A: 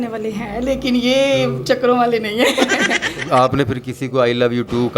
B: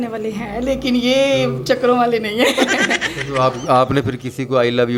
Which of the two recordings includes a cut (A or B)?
A